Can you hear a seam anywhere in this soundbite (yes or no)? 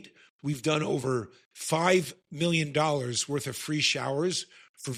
no